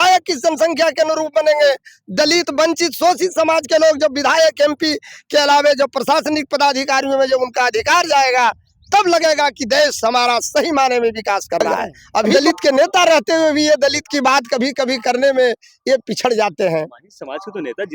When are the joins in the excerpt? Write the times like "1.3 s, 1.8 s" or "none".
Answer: 12.3 s